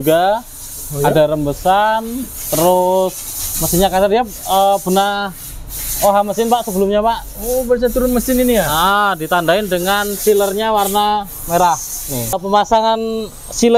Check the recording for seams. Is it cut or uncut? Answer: cut